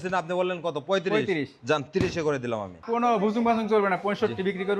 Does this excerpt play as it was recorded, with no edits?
no; 1 cut; at 2.7 s

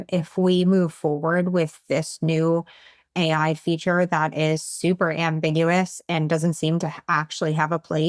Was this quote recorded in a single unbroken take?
yes; 0 cuts

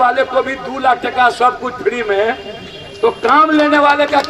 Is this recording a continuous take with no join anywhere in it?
yes; 0 cuts

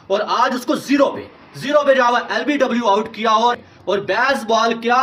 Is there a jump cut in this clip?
no; 0 cuts

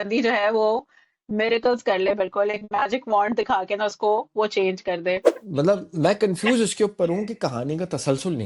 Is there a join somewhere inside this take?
yes; 1 cut; at 5.4 s

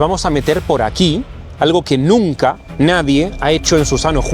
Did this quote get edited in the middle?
no; 0 cuts

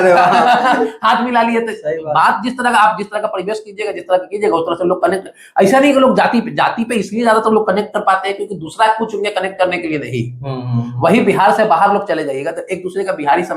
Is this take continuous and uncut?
yes; 0 cuts

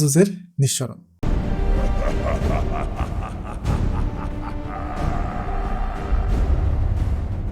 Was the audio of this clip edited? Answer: yes; 1 cut; at 1.2 s

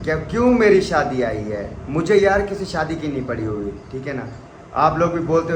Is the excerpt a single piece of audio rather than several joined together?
yes; 0 cuts

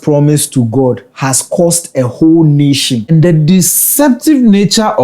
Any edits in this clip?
yes; 1 cut; at 3.1 s

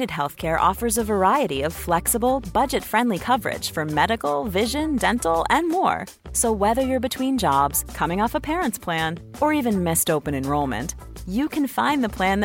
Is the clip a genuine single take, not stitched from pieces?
yes; 0 cuts

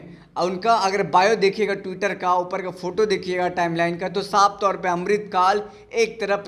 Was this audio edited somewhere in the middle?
no; 0 cuts

